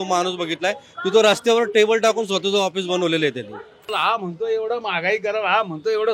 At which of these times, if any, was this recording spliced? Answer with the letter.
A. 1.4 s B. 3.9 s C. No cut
B